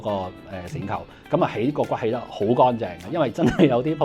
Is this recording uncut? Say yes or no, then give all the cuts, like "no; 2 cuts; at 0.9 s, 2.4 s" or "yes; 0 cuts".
yes; 0 cuts